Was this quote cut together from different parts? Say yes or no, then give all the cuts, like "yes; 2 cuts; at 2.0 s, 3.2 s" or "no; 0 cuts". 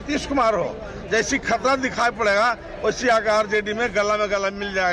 no; 0 cuts